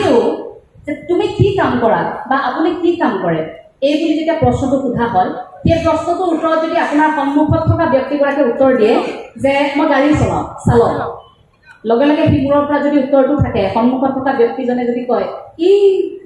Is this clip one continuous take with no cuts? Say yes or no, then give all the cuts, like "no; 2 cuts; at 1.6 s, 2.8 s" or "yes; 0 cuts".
yes; 0 cuts